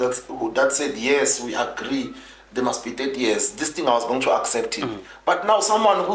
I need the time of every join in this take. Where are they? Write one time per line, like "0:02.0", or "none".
none

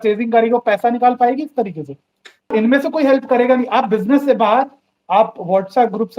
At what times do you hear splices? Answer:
0:02.5

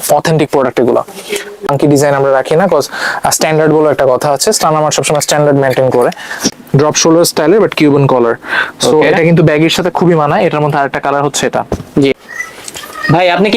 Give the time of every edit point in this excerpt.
0:01.6
0:06.5
0:12.1

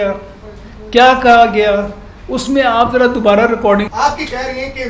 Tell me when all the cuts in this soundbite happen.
0:03.9

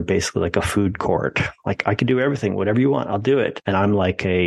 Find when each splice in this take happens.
0:03.6

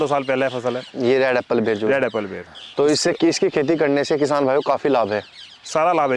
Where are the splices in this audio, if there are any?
none

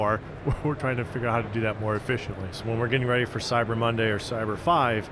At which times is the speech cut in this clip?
0:02.6

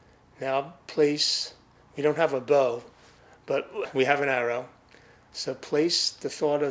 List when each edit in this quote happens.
0:03.8

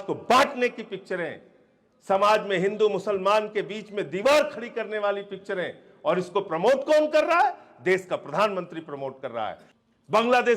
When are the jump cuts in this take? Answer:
0:09.7

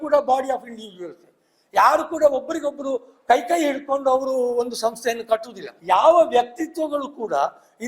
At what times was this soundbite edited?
0:05.7

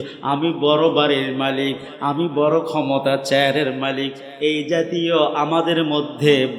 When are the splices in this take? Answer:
none

